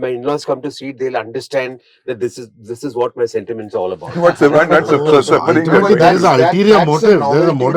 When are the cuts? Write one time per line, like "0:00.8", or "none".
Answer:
none